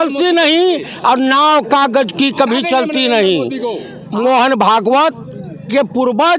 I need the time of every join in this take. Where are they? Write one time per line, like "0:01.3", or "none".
0:03.9